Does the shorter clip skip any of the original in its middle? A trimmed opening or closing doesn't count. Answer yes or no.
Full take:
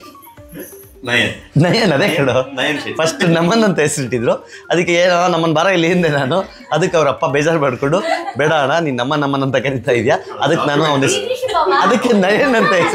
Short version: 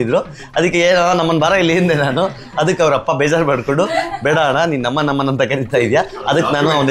no